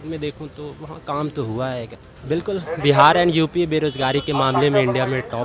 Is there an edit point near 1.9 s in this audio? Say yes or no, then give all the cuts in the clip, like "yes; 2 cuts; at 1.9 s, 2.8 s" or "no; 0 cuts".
yes; 1 cut; at 1.9 s